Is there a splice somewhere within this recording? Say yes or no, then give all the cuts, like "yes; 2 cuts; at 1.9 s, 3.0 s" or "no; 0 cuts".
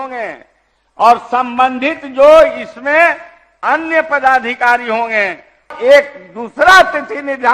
yes; 1 cut; at 5.7 s